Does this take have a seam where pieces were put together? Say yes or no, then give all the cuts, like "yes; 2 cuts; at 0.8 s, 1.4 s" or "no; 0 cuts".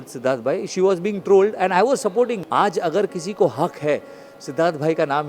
yes; 1 cut; at 2.4 s